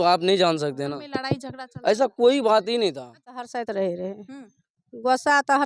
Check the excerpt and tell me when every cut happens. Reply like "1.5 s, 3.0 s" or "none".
3.5 s

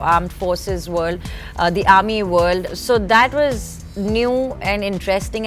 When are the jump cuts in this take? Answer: 2.7 s

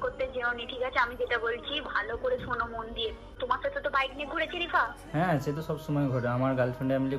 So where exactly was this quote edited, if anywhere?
3.4 s

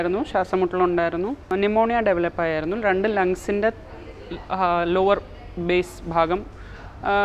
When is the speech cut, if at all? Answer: 1.4 s

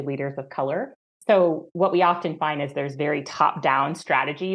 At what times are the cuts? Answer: 1.1 s

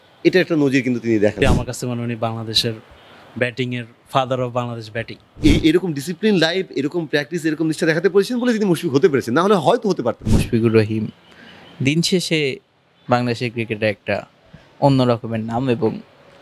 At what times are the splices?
1.4 s, 5.3 s, 10.3 s

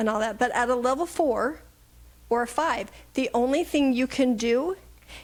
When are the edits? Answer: none

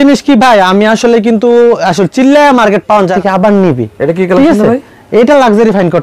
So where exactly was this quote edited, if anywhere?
3.1 s

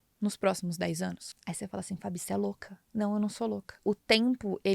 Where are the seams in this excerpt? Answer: 1.3 s, 3.8 s

